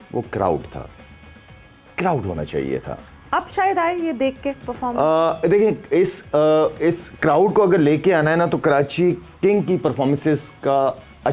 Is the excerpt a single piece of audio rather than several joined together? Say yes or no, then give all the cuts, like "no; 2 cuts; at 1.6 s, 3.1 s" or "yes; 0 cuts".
yes; 0 cuts